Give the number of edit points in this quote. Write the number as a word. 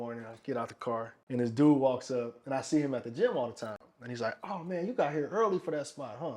one